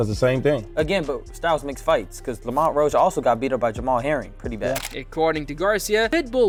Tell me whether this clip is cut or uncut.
uncut